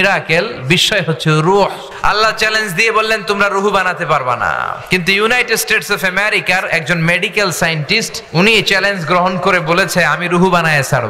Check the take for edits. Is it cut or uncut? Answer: cut